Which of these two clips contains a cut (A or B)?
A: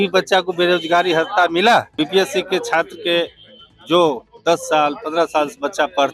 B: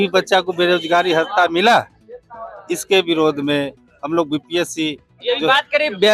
A